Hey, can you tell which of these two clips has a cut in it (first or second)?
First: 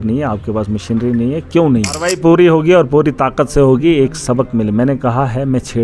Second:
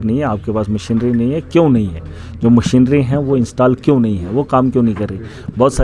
first